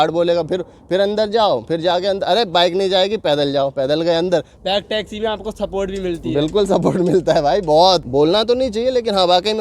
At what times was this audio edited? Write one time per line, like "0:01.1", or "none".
0:04.5
0:08.1